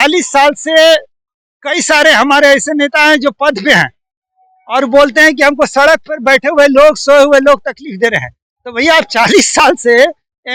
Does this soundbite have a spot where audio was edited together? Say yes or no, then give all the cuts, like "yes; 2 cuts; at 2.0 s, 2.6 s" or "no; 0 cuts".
no; 0 cuts